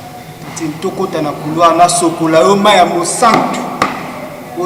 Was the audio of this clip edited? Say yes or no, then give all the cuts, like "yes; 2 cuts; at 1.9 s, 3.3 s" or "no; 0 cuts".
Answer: no; 0 cuts